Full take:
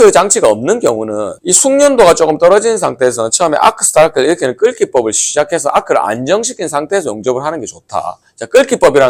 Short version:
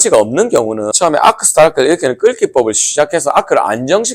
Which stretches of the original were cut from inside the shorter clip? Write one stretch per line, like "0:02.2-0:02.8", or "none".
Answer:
0:01.2-0:03.3